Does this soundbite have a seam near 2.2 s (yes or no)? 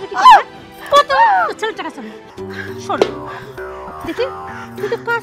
yes